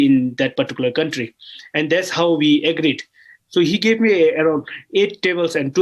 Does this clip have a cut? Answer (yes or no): no